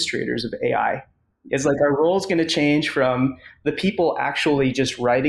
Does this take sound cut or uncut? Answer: uncut